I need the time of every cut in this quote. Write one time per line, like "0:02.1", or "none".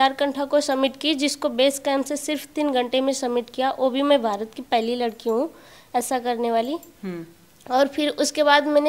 none